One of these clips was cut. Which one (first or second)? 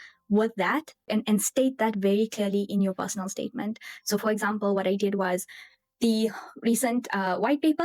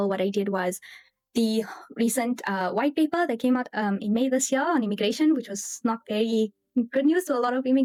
first